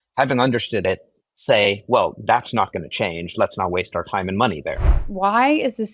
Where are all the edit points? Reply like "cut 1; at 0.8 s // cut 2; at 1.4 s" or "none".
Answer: cut 1; at 5.0 s